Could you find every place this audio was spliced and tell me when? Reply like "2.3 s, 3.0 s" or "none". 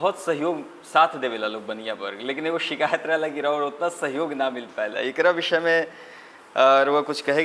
none